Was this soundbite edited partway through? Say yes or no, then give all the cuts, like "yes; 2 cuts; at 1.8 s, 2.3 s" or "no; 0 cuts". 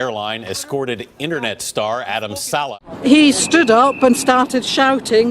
yes; 1 cut; at 2.7 s